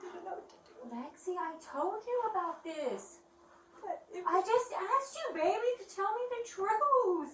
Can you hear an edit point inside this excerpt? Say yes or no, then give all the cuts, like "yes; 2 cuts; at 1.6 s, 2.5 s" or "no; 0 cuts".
no; 0 cuts